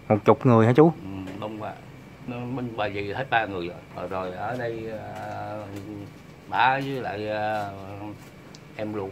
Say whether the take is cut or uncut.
cut